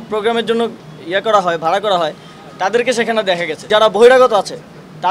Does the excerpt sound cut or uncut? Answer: cut